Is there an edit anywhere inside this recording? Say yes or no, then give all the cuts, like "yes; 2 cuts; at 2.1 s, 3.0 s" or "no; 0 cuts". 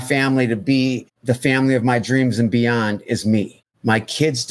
yes; 2 cuts; at 1.1 s, 3.6 s